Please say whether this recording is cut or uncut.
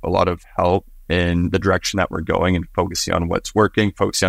uncut